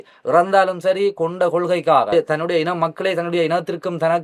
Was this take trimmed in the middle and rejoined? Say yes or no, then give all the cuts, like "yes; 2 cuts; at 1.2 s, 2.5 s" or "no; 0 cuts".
yes; 1 cut; at 2.1 s